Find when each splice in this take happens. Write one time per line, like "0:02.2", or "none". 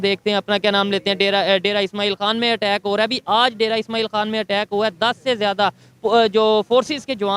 none